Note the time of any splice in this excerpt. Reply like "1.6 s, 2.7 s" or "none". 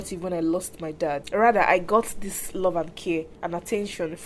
1.2 s, 3.4 s